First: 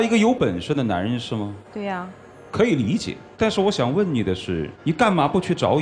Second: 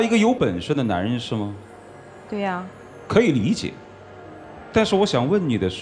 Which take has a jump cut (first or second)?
first